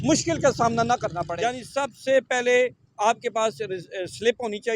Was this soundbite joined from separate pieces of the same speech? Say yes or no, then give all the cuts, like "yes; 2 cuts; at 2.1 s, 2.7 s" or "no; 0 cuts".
yes; 1 cut; at 1.3 s